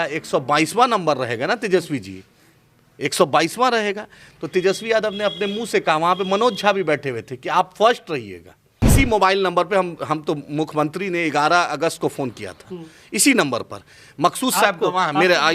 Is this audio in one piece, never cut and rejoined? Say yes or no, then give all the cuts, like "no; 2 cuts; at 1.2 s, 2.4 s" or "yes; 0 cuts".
no; 1 cut; at 8.9 s